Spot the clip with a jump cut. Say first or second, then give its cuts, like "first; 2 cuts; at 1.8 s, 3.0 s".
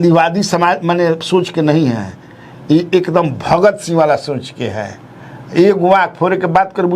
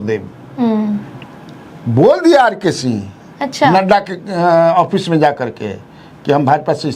second; 1 cut; at 1.2 s